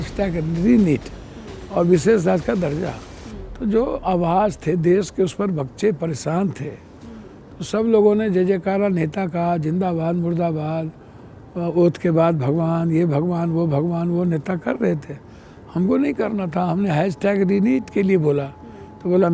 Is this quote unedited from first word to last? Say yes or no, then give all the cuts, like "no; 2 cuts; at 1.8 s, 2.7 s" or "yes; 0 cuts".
yes; 0 cuts